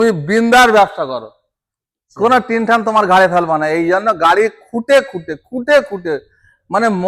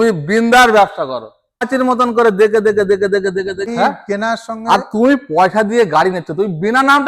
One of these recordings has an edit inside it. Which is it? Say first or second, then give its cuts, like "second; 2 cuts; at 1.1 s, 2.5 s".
second; 2 cuts; at 1.7 s, 3.7 s